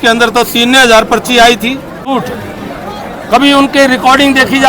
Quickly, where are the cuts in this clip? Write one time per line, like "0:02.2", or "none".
0:02.1

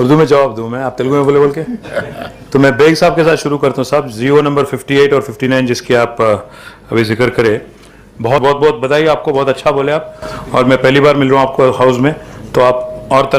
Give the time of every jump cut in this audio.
0:08.4

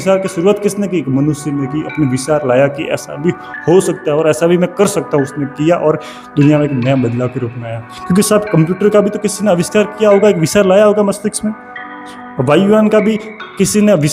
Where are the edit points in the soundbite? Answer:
none

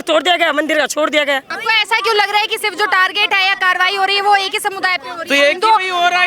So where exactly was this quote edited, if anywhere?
0:01.5

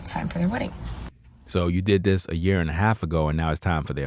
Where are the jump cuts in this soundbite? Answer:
none

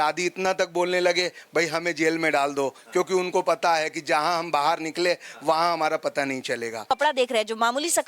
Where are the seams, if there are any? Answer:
0:06.8

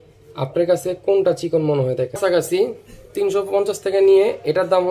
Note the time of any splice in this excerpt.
0:02.2

